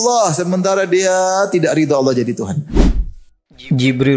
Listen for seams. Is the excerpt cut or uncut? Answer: cut